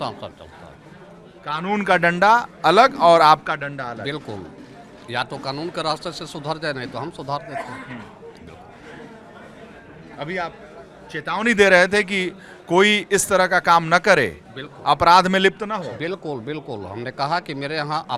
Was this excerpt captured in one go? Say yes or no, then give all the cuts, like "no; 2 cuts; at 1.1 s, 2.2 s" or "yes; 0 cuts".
yes; 0 cuts